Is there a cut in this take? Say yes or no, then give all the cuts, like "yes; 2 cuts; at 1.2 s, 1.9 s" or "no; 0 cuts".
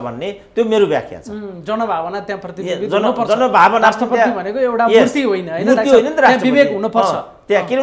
no; 0 cuts